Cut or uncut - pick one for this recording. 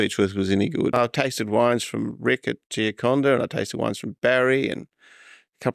cut